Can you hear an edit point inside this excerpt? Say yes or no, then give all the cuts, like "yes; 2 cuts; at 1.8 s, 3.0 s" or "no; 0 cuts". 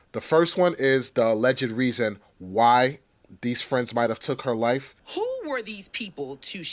yes; 1 cut; at 5.0 s